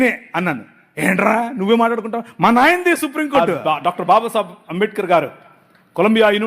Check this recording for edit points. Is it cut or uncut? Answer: cut